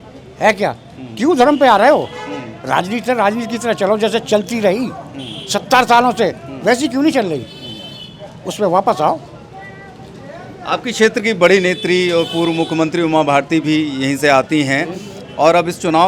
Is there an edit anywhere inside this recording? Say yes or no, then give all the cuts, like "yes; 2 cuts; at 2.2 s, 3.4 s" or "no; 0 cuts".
no; 0 cuts